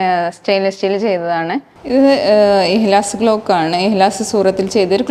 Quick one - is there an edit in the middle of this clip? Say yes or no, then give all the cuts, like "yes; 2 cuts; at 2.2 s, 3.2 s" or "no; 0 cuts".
yes; 1 cut; at 1.7 s